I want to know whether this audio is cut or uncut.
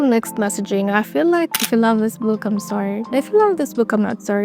cut